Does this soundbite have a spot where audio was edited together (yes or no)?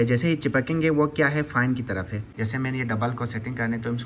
yes